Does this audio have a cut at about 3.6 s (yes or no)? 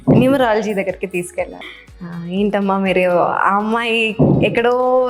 no